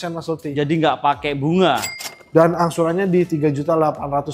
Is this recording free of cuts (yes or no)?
no